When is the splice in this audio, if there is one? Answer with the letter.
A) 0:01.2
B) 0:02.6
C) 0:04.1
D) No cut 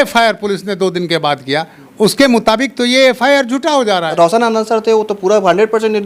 C